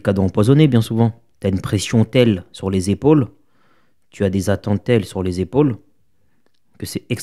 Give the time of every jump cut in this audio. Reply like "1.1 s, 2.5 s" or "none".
1.3 s